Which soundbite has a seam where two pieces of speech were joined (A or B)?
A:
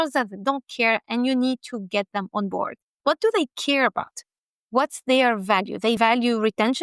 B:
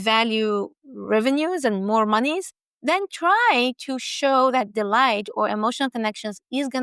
A